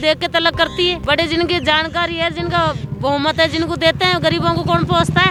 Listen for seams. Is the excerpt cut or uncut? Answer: uncut